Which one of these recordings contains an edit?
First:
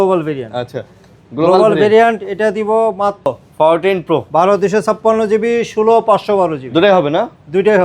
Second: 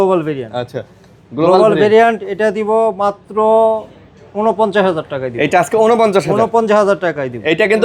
first; 1 cut; at 3.3 s

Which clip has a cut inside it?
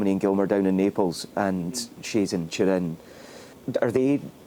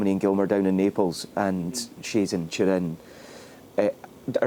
first; 1 cut; at 3.5 s

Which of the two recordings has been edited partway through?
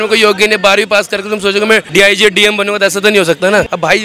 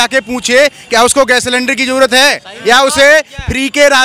first; 1 cut; at 1.9 s

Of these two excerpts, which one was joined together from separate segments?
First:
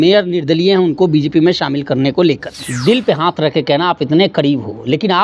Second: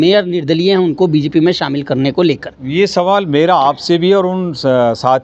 first; 1 cut; at 2.5 s

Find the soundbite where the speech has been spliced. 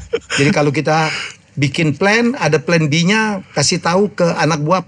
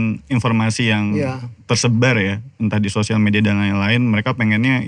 second; 1 cut; at 1.5 s

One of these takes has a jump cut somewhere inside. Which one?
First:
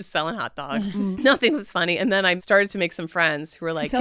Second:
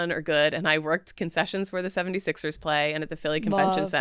first; 2 cuts; at 1.1 s, 2.4 s

